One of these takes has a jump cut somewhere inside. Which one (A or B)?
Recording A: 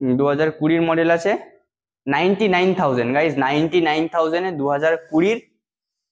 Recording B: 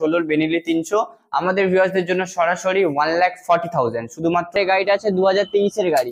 B